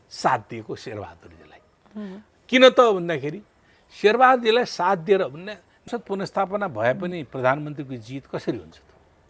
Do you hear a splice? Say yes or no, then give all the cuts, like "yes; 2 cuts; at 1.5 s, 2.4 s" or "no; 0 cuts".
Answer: yes; 1 cut; at 5.8 s